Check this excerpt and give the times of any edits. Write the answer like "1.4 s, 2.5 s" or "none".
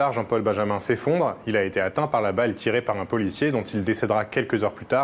none